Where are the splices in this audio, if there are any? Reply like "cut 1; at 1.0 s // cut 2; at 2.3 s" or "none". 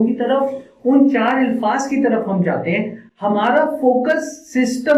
none